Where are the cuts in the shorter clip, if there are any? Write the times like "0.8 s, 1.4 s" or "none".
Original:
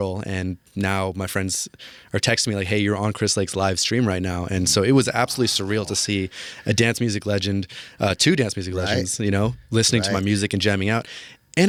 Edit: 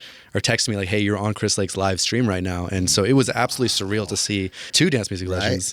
4.7 s